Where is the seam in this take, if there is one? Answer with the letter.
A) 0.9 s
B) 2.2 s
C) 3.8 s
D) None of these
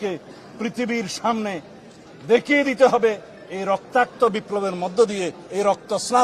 D